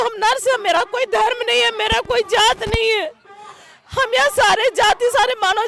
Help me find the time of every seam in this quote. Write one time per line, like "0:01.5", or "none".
none